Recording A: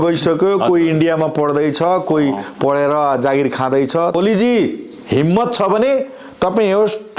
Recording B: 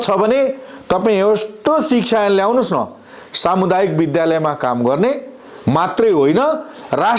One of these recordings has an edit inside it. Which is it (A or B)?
A